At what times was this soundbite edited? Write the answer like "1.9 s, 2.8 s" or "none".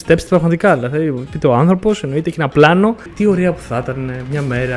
3.1 s